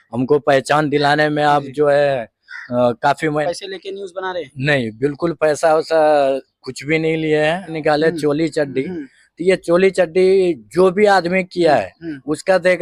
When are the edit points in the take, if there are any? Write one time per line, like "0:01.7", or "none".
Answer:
0:03.4
0:07.7